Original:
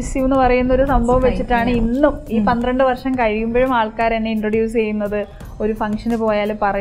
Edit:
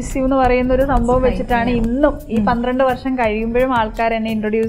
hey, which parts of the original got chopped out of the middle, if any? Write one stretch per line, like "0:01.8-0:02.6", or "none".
none